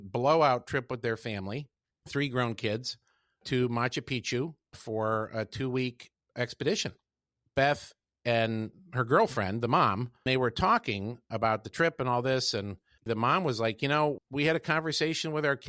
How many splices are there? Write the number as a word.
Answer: three